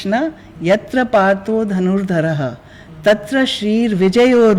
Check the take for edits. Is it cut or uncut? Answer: uncut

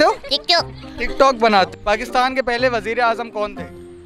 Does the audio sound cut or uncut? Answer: cut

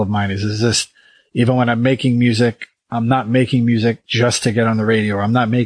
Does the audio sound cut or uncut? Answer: cut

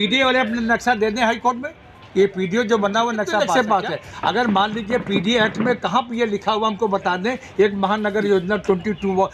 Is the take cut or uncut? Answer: cut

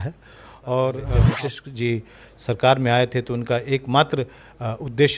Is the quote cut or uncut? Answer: cut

